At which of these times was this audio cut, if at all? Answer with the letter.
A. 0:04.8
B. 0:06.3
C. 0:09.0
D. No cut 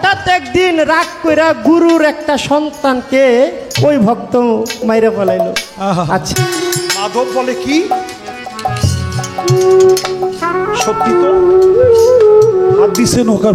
B